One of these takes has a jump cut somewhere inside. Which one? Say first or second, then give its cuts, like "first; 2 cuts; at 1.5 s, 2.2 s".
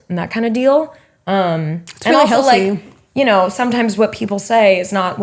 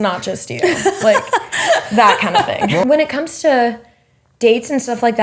second; 1 cut; at 2.8 s